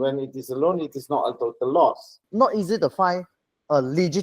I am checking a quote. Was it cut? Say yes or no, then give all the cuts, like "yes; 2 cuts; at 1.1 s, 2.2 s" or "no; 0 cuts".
yes; 1 cut; at 2.2 s